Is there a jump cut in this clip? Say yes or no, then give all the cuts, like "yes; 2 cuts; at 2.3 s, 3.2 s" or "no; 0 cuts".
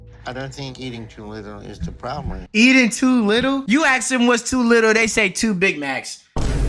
yes; 1 cut; at 2.4 s